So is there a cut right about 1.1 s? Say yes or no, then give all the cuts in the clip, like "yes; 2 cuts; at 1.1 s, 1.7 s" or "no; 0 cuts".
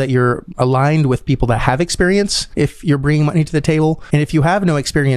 no; 2 cuts; at 2.4 s, 4.0 s